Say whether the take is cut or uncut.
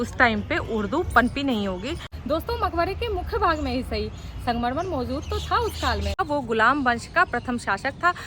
cut